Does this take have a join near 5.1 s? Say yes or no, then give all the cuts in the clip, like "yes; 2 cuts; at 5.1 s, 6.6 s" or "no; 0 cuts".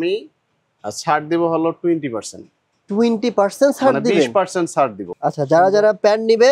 yes; 1 cut; at 5.1 s